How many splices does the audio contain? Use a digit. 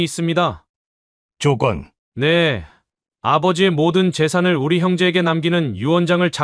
1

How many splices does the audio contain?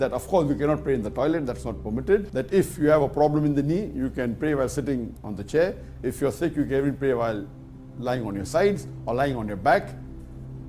1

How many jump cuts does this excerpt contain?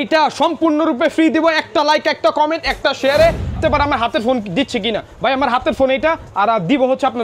1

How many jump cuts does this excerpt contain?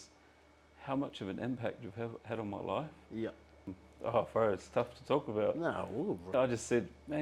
2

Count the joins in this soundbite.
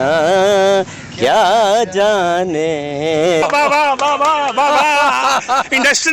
1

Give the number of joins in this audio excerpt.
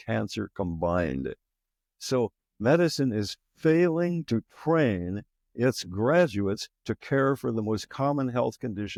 0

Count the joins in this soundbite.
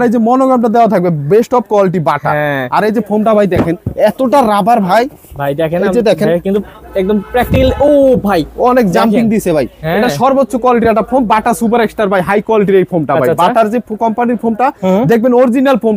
0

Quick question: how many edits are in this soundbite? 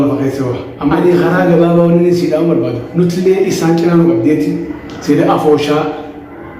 1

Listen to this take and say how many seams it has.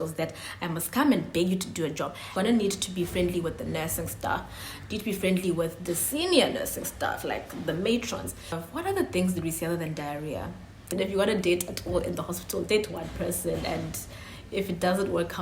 3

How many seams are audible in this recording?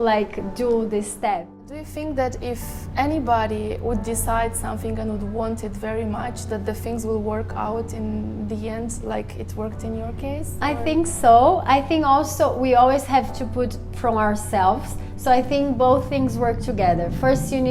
1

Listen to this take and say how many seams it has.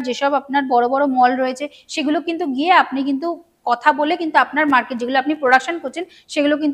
0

